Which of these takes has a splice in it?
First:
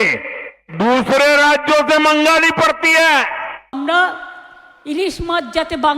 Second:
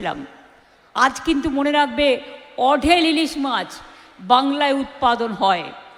first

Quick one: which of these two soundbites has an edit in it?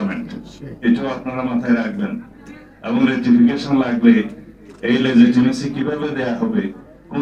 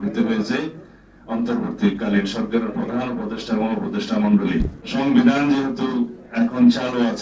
second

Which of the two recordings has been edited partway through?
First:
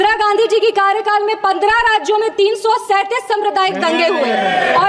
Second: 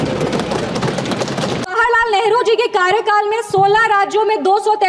second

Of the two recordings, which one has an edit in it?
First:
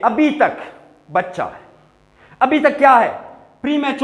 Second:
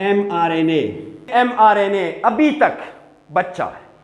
second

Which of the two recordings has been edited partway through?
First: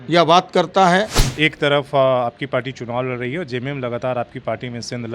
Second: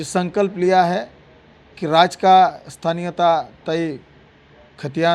first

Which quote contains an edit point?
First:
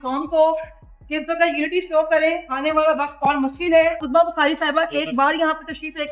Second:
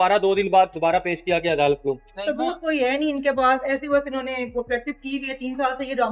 first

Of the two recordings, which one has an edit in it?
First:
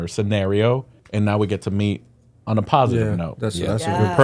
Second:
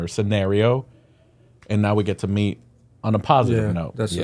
first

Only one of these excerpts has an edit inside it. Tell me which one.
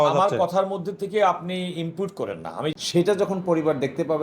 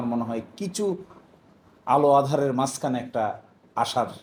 first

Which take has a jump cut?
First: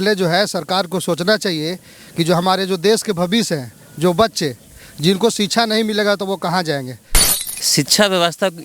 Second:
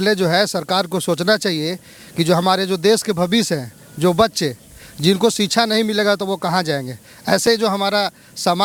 first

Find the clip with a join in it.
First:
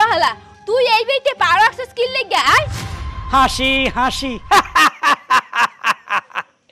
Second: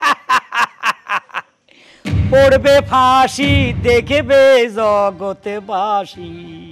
first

